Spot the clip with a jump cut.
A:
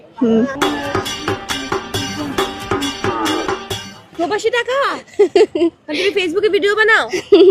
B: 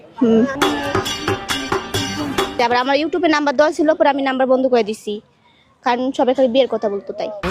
B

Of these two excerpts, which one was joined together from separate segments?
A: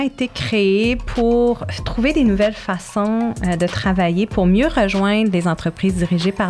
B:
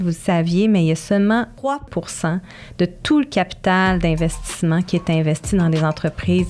B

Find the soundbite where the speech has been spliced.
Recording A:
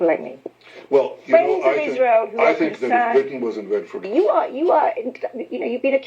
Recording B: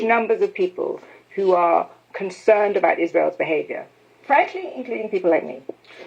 A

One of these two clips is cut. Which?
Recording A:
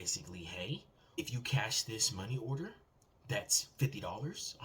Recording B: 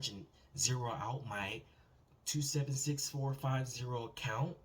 A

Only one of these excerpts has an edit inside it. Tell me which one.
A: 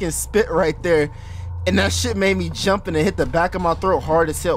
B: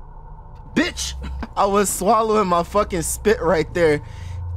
B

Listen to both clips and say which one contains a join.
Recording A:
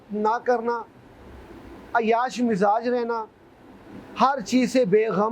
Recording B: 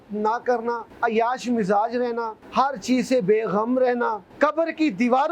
B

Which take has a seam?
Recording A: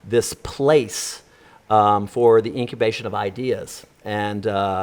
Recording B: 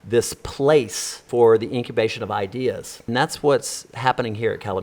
B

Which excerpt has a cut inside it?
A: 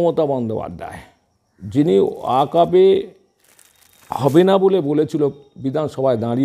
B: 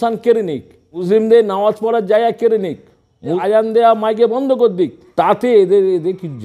B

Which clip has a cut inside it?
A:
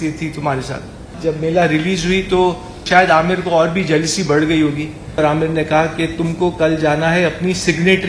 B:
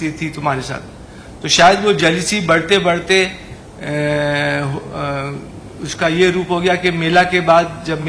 A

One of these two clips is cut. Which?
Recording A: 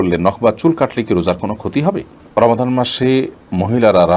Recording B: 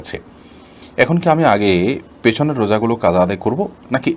A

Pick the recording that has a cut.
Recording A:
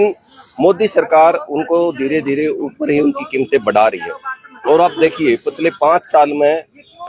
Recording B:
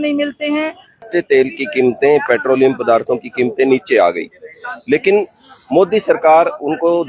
B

